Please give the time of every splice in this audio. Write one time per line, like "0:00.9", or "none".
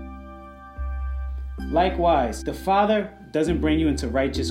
0:02.4